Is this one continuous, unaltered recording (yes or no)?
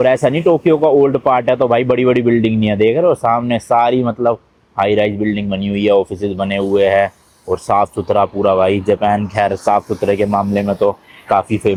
yes